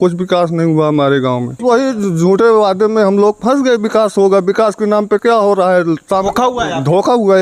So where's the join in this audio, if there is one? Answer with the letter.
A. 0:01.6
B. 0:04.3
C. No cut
A